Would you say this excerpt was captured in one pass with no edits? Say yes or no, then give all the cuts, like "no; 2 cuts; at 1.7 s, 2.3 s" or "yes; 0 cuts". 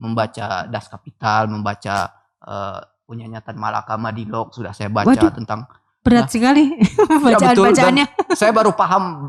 yes; 0 cuts